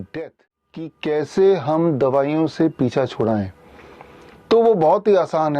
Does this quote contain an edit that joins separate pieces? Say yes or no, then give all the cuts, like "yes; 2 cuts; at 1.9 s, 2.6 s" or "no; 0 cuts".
yes; 1 cut; at 1.0 s